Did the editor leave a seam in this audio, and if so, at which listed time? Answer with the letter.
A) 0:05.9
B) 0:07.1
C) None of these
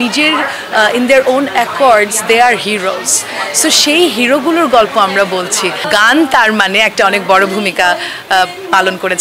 A